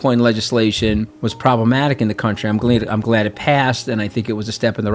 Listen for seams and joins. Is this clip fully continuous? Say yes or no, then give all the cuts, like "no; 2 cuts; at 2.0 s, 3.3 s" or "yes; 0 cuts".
no; 1 cut; at 1.2 s